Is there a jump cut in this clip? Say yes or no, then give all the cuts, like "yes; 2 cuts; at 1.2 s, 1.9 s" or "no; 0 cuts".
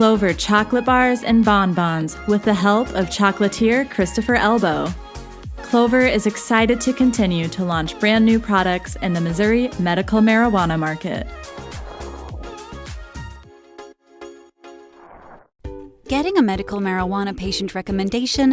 yes; 1 cut; at 15.5 s